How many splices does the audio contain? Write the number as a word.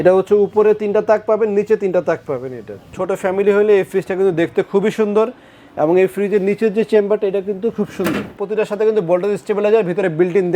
two